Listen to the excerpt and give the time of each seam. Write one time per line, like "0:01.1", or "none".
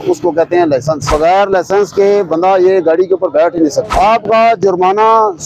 0:01.0
0:03.9